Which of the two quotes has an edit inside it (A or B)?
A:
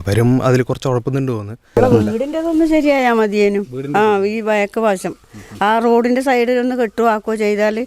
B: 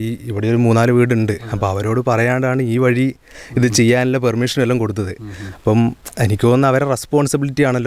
A